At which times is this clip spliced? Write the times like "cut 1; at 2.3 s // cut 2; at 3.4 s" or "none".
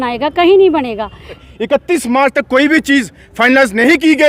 cut 1; at 1.4 s